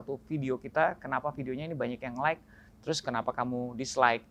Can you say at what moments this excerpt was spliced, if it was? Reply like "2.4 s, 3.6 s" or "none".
none